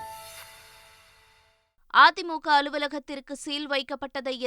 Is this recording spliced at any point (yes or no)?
yes